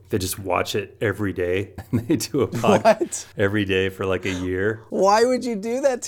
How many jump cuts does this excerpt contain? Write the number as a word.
three